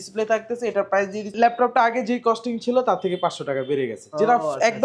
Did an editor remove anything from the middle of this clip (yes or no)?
yes